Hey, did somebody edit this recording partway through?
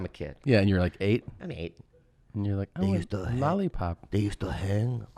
no; 0 cuts

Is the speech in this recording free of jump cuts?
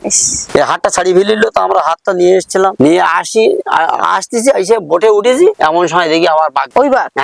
no; 1 cut; at 2.7 s

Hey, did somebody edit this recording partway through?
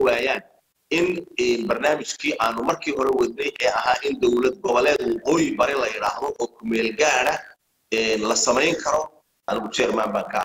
yes; 1 cut; at 9.4 s

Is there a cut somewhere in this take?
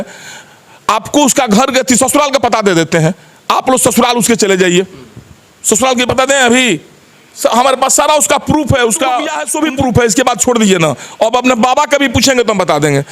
yes; 1 cut; at 9.4 s

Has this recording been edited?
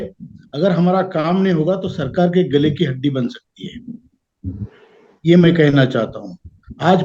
no; 0 cuts

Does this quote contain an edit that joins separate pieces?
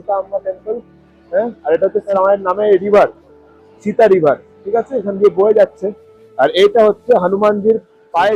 yes; 1 cut; at 2.1 s

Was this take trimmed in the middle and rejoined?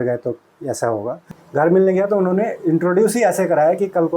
yes; 1 cut; at 1.2 s

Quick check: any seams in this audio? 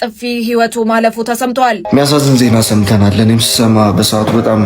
yes; 1 cut; at 1.8 s

